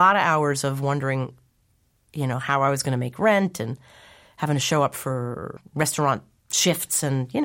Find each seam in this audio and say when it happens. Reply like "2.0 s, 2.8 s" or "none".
5.6 s